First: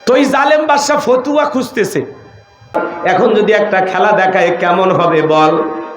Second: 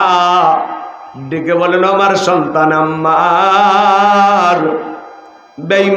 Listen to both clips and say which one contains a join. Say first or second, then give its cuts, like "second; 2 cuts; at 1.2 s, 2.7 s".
first; 1 cut; at 2.8 s